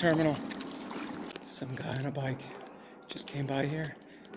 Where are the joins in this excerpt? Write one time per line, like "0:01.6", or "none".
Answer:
0:01.3